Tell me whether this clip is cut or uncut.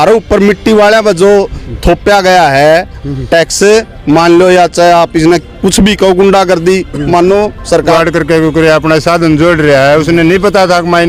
cut